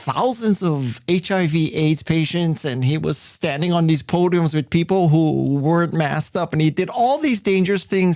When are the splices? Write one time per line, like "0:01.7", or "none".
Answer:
none